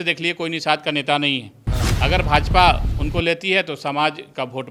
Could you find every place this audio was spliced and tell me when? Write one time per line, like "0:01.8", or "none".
none